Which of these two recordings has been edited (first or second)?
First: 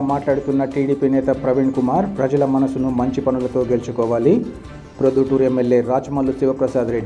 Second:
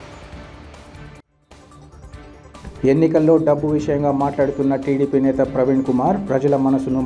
second